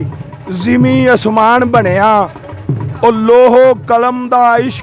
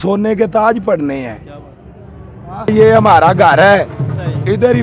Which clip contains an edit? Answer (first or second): second